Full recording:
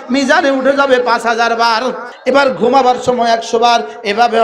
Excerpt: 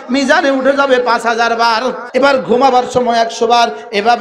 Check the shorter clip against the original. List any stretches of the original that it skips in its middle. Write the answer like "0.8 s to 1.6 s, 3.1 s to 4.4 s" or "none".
2.0 s to 2.1 s